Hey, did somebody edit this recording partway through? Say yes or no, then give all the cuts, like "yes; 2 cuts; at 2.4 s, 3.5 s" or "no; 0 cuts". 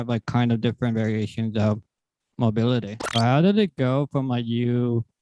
yes; 1 cut; at 3.0 s